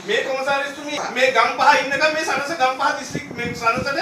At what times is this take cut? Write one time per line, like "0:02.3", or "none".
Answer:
0:01.0